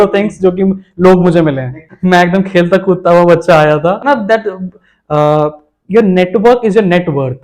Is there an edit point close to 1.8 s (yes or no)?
yes